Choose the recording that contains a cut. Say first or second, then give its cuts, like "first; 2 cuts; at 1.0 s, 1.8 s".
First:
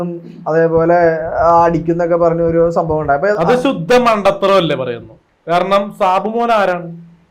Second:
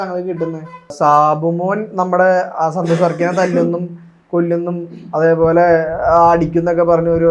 second; 1 cut; at 0.9 s